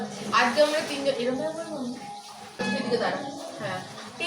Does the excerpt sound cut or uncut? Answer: cut